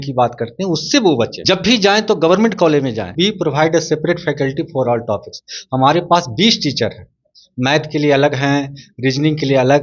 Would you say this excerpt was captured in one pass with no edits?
no; 2 cuts; at 1.4 s, 3.1 s

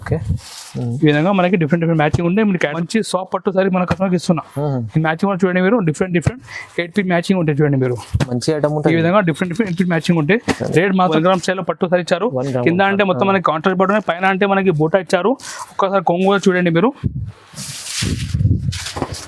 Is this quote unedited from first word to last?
no; 2 cuts; at 2.7 s, 11.1 s

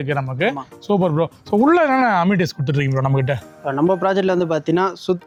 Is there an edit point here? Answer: no; 0 cuts

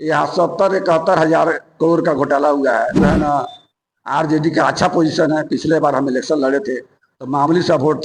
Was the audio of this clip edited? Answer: yes; 1 cut; at 3.0 s

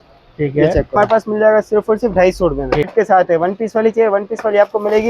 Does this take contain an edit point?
yes; 2 cuts; at 0.9 s, 2.9 s

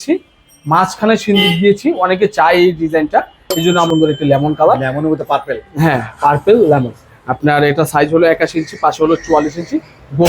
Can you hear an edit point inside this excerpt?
yes; 1 cut; at 3.9 s

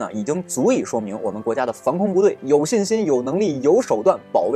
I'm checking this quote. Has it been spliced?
no; 0 cuts

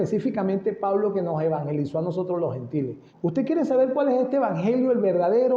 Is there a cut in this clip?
yes; 1 cut; at 3.0 s

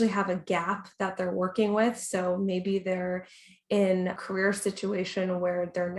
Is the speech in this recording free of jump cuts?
no; 1 cut; at 4.2 s

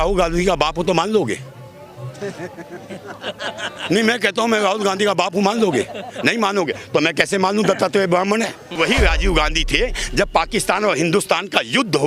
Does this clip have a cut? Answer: yes; 1 cut; at 8.8 s

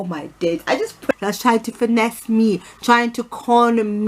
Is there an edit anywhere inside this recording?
yes; 1 cut; at 1.1 s

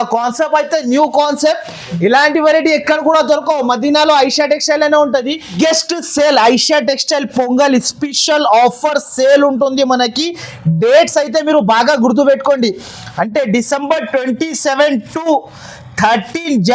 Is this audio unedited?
no; 1 cut; at 5.6 s

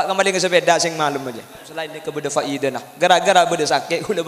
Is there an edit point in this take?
yes; 1 cut; at 2.0 s

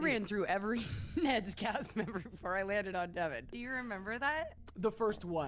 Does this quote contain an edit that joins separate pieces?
yes; 1 cut; at 3.6 s

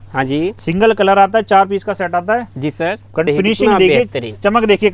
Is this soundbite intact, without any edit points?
no; 1 cut; at 3.3 s

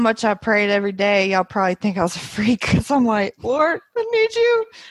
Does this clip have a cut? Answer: no; 0 cuts

